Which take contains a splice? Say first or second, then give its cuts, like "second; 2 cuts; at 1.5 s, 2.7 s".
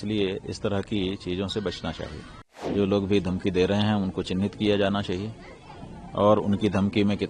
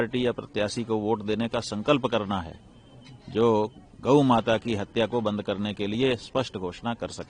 first; 1 cut; at 2.7 s